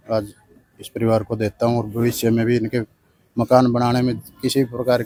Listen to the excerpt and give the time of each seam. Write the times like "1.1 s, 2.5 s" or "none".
none